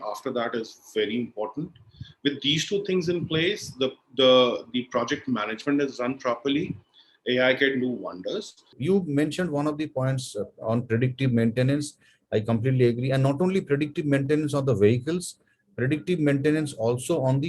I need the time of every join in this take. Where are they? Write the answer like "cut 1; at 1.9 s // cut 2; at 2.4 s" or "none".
cut 1; at 8.7 s